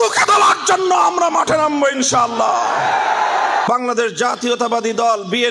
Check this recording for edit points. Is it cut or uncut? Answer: cut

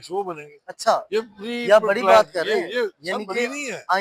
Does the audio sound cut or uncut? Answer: uncut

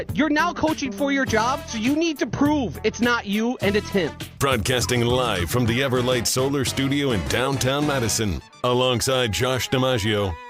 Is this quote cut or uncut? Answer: cut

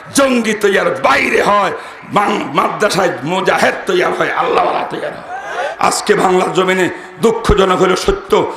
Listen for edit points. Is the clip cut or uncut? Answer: cut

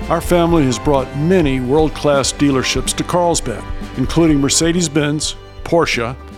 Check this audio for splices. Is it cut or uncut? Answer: uncut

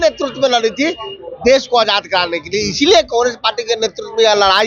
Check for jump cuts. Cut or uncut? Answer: uncut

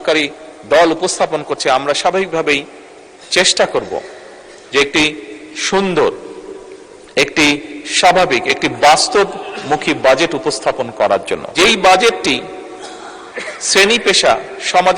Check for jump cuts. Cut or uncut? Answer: cut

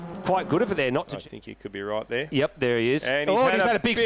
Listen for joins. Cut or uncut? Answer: cut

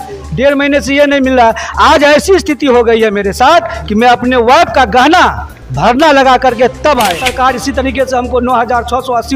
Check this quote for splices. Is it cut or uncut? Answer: cut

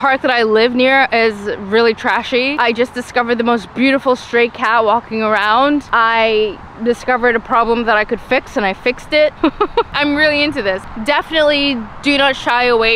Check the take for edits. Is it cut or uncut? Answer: uncut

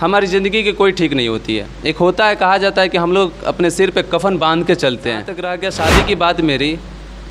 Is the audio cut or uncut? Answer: cut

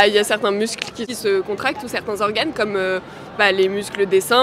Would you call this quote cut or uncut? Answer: cut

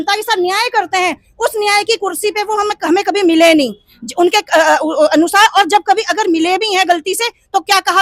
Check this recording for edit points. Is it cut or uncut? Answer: uncut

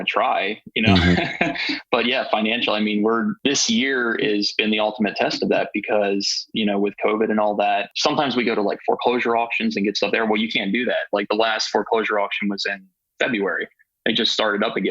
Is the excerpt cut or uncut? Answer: cut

